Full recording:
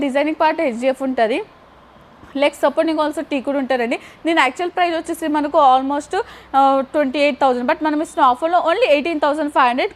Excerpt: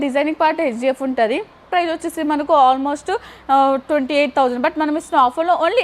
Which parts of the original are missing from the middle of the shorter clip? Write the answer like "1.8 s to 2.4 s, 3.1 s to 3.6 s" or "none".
1.7 s to 4.7 s